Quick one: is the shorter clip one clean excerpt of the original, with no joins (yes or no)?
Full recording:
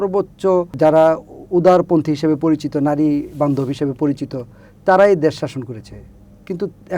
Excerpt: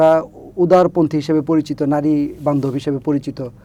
yes